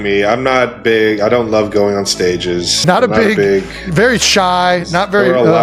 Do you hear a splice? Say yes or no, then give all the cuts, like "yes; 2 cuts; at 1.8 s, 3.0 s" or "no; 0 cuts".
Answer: yes; 1 cut; at 2.8 s